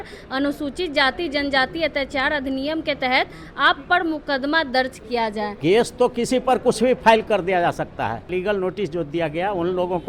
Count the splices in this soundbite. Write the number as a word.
two